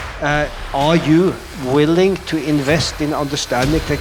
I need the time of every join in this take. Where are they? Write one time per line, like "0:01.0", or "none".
0:01.4